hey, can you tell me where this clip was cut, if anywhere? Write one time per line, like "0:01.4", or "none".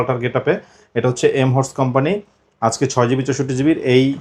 none